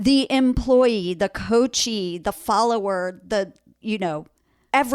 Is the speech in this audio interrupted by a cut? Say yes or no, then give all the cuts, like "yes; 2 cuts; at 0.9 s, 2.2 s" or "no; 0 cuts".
no; 0 cuts